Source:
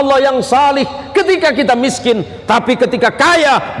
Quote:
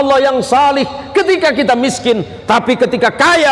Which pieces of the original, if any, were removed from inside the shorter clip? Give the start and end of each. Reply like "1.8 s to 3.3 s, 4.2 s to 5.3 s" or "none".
none

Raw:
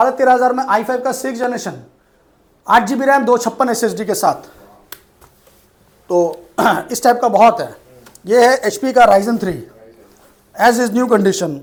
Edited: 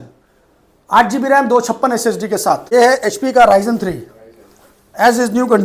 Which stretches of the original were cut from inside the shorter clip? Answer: 4.4 s to 8.2 s

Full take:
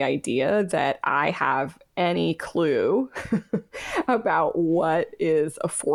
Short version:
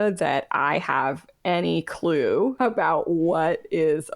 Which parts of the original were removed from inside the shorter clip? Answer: 3.1 s to 4.0 s

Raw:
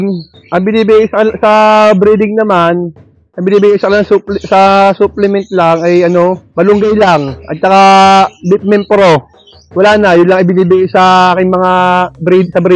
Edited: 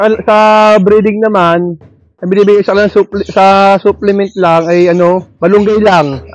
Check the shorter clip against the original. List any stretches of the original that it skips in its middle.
none

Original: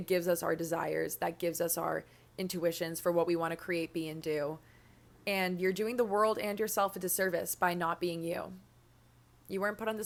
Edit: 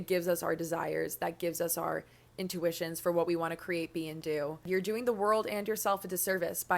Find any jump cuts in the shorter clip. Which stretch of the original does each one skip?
4.7 s to 5.6 s

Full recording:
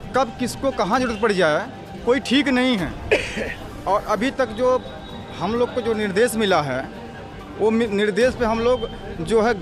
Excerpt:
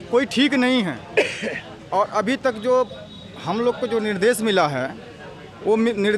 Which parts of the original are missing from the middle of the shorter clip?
none

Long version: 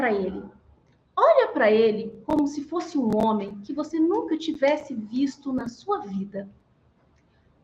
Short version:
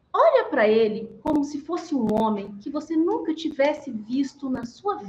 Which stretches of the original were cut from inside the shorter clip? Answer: none

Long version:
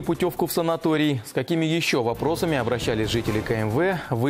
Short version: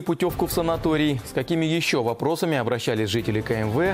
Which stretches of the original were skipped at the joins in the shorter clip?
none

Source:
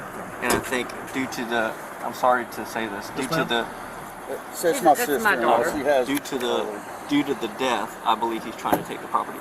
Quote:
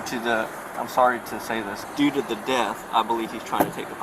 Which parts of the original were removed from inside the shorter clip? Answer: 3.0 s to 6.9 s

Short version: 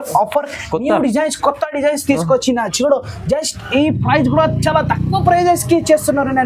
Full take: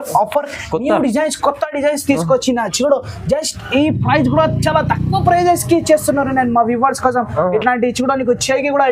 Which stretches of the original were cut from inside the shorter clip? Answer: none

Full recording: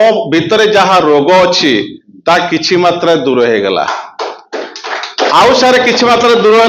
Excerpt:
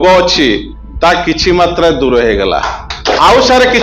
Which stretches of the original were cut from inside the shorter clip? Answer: 4.1 s to 5.0 s

